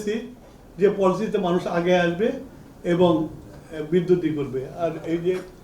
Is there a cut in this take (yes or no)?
no